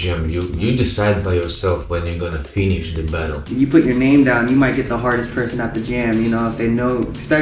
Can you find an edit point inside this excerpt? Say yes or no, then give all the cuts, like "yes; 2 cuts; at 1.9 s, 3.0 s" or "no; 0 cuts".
yes; 1 cut; at 3.4 s